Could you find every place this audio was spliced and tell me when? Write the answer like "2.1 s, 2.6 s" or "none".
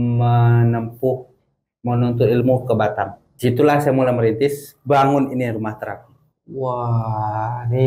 3.2 s